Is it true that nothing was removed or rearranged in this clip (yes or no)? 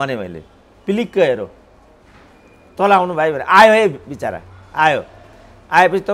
yes